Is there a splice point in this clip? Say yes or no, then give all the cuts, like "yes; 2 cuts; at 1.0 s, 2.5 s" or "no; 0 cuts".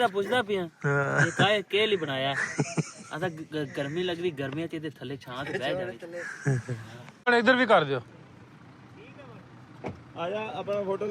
yes; 1 cut; at 7.2 s